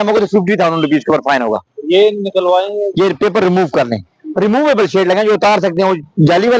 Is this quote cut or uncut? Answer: uncut